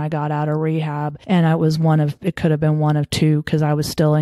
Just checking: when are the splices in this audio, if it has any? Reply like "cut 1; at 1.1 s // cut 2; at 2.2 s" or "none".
cut 1; at 1.1 s